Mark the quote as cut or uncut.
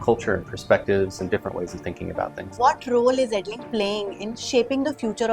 cut